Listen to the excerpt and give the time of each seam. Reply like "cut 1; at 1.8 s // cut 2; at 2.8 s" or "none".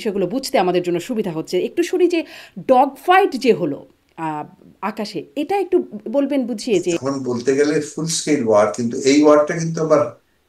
cut 1; at 7.0 s